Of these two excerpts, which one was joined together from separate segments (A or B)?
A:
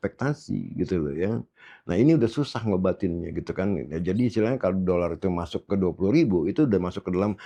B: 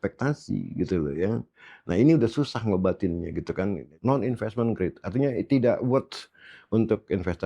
B